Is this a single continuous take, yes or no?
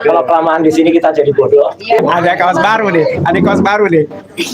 no